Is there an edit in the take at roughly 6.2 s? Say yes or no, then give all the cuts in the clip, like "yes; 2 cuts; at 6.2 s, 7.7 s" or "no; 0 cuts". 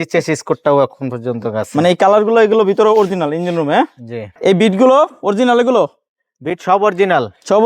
no; 1 cut; at 4.4 s